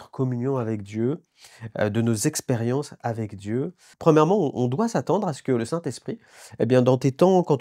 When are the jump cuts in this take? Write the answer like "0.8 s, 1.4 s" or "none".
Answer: 3.8 s